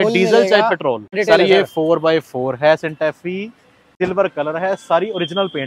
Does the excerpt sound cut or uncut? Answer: cut